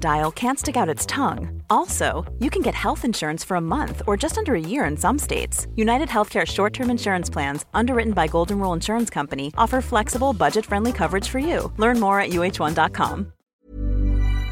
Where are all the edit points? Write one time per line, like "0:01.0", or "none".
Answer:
0:13.6